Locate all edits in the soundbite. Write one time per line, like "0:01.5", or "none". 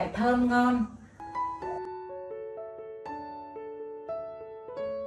none